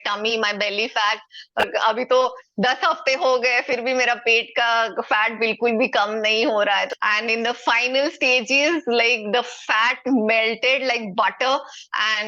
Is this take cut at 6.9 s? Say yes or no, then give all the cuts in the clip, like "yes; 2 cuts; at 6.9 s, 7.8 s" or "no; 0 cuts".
yes; 2 cuts; at 1.6 s, 6.9 s